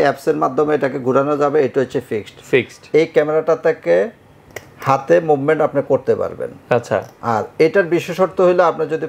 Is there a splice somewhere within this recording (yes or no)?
no